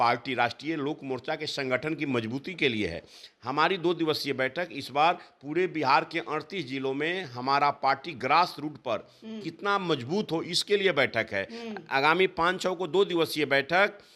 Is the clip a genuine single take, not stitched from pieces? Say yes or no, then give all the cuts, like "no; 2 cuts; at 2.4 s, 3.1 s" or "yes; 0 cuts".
yes; 0 cuts